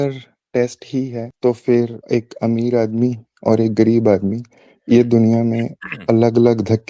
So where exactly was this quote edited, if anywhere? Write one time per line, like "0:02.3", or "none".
0:01.2
0:02.0